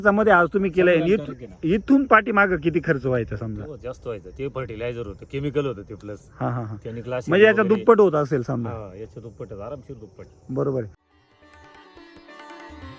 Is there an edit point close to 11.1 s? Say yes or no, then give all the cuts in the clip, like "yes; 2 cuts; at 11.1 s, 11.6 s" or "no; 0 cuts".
yes; 1 cut; at 11.1 s